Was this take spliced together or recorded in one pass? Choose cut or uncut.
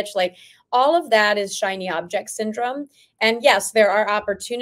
uncut